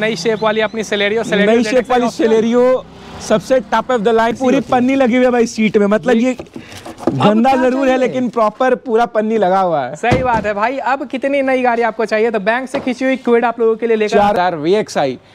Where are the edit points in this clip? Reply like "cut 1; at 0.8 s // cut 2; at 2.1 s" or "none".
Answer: cut 1; at 4.3 s // cut 2; at 14.3 s